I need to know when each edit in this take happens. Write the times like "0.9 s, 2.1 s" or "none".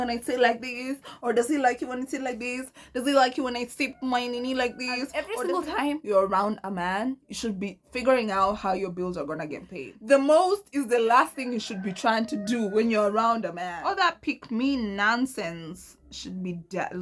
5.1 s, 9.9 s, 13.6 s